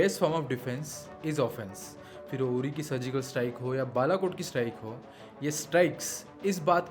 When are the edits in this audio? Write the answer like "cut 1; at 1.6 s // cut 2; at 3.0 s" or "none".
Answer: none